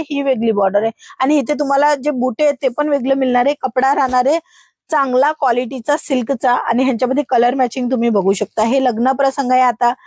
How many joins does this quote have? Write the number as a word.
zero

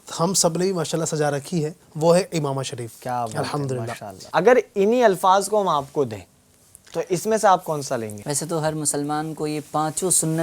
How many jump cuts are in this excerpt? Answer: three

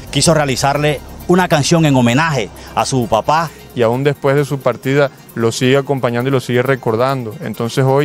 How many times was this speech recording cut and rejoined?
one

